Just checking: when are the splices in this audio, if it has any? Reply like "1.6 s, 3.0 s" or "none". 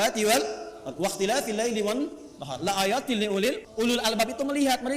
3.6 s